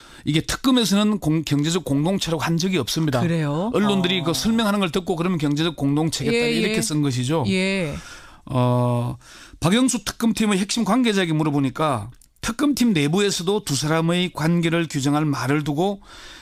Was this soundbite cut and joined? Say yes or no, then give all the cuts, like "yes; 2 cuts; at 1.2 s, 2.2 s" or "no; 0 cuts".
no; 0 cuts